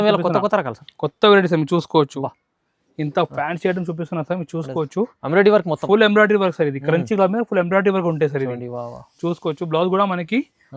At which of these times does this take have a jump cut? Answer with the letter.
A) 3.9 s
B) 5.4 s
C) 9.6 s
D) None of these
D